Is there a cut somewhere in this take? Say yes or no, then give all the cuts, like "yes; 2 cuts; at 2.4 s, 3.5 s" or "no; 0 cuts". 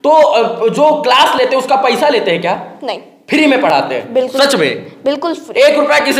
no; 0 cuts